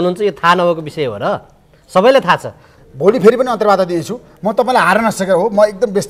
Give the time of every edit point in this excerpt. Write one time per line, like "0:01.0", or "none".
0:02.7